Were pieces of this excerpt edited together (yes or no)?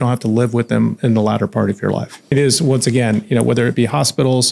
yes